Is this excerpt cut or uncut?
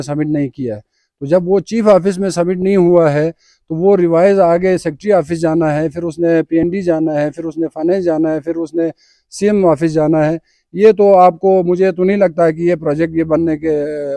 uncut